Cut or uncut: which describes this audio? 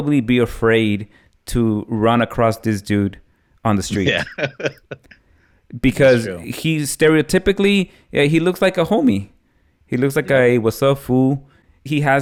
uncut